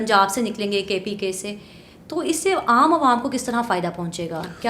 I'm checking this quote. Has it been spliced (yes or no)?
no